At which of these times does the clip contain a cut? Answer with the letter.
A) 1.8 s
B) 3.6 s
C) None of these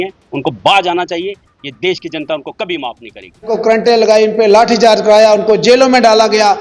B